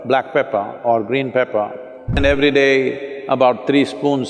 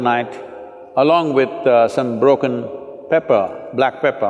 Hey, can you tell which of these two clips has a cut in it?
first; 1 cut; at 2.2 s

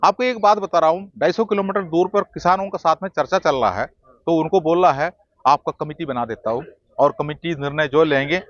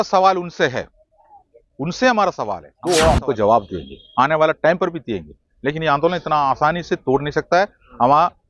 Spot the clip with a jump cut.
second; 1 cut; at 2.7 s

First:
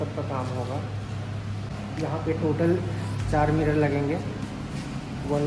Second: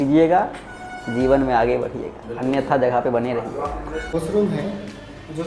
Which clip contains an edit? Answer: second; 1 cut; at 4.1 s

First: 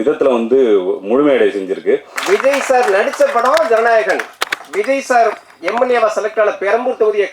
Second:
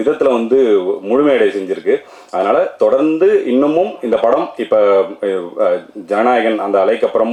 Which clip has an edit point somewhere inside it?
first; 1 cut; at 2.1 s

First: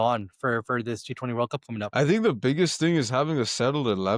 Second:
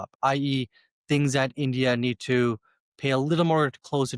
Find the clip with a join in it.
first; 1 cut; at 1.9 s

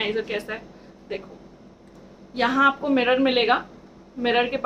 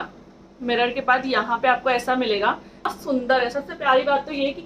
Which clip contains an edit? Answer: second; 1 cut; at 2.9 s

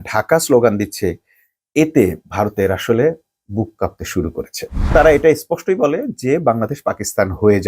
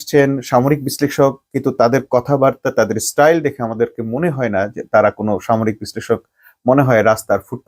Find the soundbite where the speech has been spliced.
first; 1 cut; at 4.9 s

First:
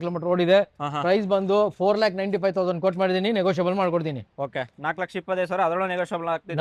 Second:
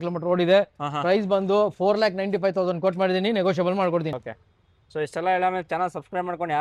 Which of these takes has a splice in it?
second; 1 cut; at 4.2 s

